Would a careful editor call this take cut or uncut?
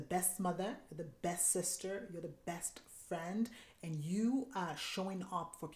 uncut